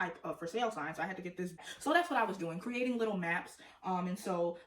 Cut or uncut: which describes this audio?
cut